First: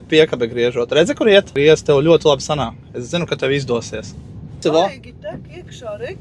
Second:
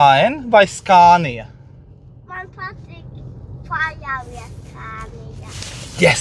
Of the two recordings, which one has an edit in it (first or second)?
first